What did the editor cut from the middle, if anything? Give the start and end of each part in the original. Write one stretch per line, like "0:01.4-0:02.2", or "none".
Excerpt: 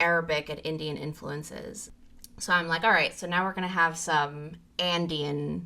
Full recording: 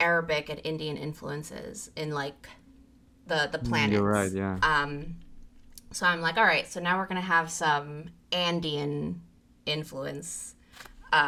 0:01.8-0:05.3